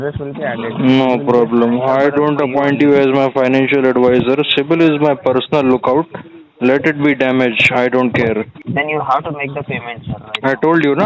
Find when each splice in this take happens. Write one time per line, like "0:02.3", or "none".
0:08.6